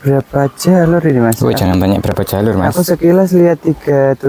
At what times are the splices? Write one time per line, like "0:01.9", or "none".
none